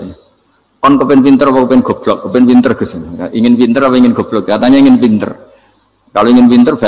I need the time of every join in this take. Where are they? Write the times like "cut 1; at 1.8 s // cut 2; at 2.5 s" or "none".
none